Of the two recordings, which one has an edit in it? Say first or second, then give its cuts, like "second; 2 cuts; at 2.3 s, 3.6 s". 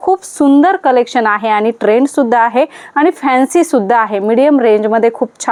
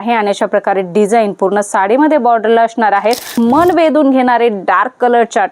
second; 1 cut; at 3.3 s